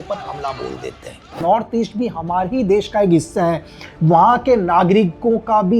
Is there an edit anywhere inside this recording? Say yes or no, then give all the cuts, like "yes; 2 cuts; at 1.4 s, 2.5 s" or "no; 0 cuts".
yes; 1 cut; at 1.4 s